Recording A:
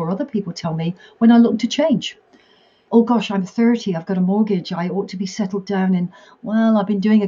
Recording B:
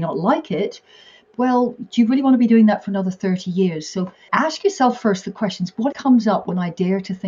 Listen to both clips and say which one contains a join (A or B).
B